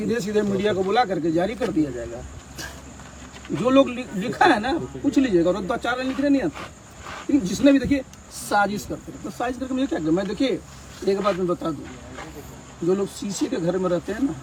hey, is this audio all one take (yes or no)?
yes